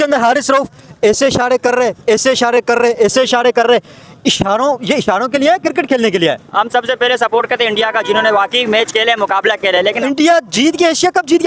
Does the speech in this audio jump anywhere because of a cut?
yes; 2 cuts; at 6.4 s, 9.8 s

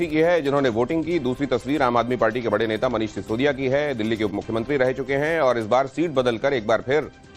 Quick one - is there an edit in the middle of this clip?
no; 0 cuts

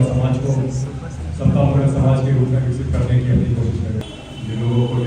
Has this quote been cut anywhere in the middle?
yes; 1 cut; at 4.0 s

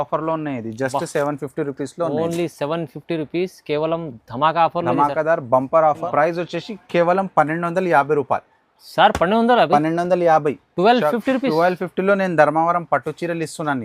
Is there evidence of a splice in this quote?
yes; 1 cut; at 6.1 s

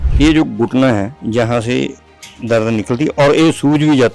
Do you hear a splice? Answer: yes; 1 cut; at 1.1 s

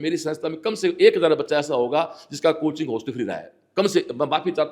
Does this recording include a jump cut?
no; 0 cuts

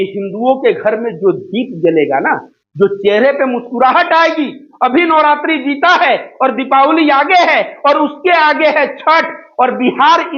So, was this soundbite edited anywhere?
no; 0 cuts

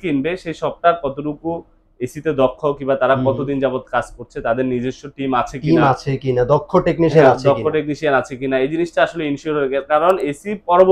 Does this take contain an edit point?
no; 0 cuts

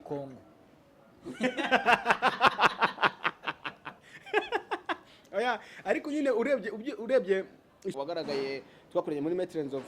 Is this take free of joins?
no; 1 cut; at 7.9 s

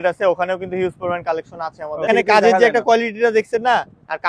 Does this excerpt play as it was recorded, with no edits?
no; 1 cut; at 2.1 s

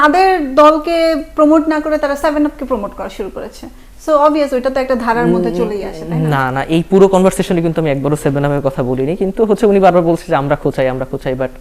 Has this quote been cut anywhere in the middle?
no; 0 cuts

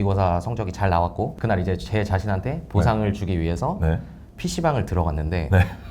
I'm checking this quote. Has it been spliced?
yes; 1 cut; at 1.3 s

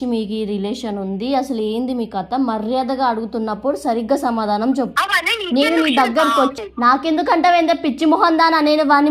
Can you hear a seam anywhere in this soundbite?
yes; 2 cuts; at 4.9 s, 6.6 s

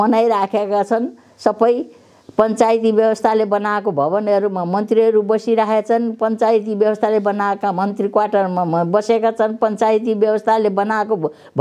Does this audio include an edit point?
no; 0 cuts

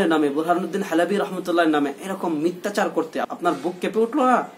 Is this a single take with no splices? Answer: no; 1 cut; at 3.3 s

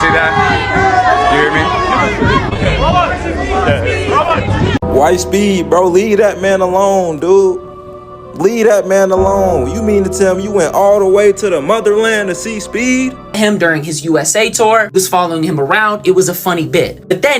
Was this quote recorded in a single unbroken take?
no; 2 cuts; at 4.8 s, 13.4 s

